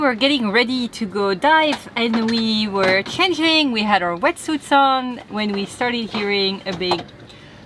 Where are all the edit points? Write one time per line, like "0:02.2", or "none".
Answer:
0:05.2